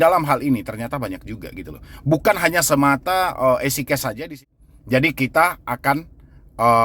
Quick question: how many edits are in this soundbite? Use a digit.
1